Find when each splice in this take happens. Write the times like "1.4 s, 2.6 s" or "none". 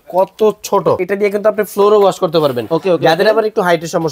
1.0 s

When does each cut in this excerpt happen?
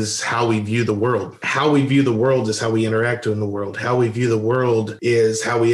1.4 s

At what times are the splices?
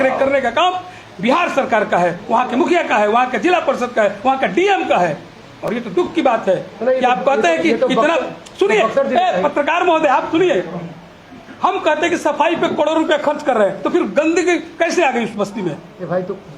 none

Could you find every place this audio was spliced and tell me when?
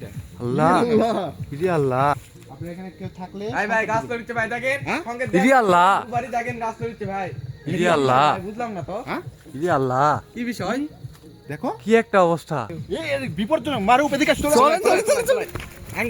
2.3 s, 12.7 s

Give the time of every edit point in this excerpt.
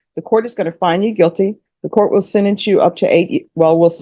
none

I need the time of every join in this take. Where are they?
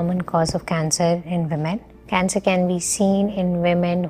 1.9 s

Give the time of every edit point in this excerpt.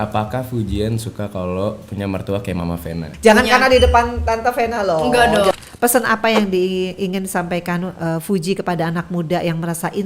3.0 s, 5.5 s

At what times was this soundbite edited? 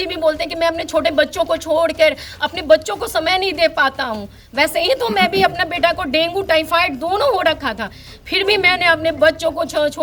none

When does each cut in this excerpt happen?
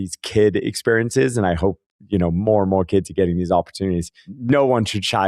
4.3 s

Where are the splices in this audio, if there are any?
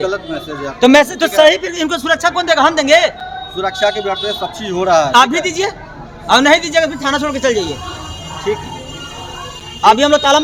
none

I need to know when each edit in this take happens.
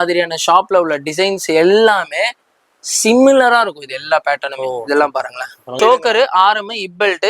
5.7 s

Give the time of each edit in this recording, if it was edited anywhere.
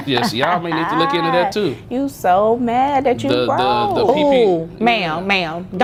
none

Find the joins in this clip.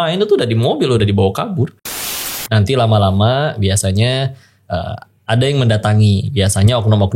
2.1 s

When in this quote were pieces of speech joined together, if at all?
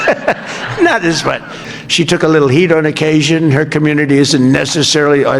1.7 s

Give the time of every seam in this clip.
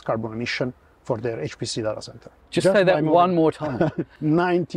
none

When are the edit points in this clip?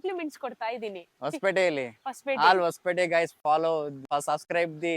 4.1 s

